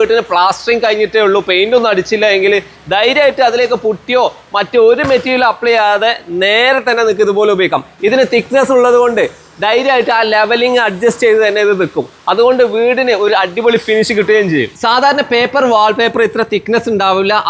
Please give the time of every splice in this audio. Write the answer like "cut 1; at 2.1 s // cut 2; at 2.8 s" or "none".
none